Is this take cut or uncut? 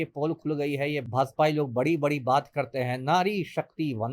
cut